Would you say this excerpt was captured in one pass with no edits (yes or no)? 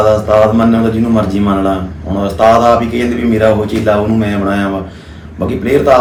yes